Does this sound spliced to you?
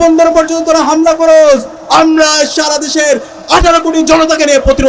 no; 0 cuts

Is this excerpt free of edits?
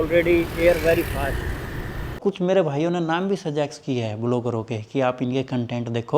no; 1 cut; at 2.2 s

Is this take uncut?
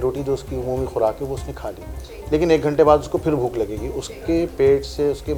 yes; 0 cuts

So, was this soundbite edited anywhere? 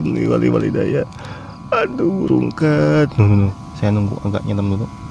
yes; 1 cut; at 3.6 s

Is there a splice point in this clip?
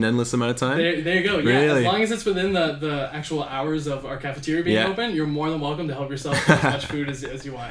no; 0 cuts

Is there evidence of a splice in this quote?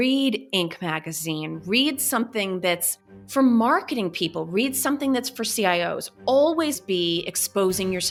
no; 0 cuts

